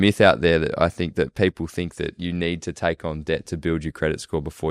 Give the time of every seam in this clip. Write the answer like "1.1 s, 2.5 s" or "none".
none